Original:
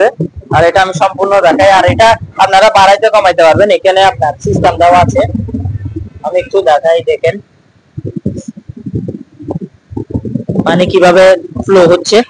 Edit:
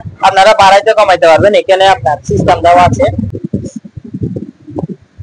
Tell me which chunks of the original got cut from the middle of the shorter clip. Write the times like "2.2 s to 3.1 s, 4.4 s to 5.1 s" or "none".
5.5 s to 8.0 s